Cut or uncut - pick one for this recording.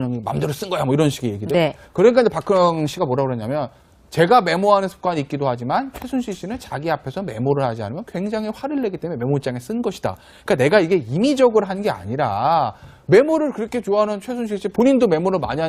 uncut